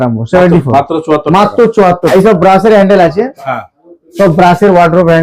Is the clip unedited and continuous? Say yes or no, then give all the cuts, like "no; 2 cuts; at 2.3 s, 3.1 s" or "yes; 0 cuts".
no; 1 cut; at 2.1 s